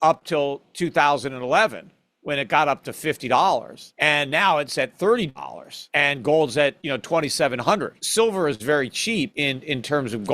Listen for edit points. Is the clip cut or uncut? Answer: cut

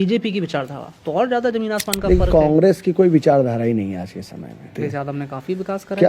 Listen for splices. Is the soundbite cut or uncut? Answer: cut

